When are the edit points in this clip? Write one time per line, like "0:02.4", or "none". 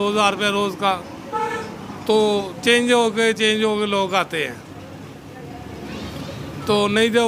none